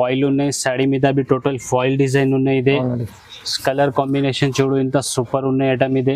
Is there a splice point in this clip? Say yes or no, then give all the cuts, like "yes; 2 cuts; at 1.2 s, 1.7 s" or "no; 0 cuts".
no; 0 cuts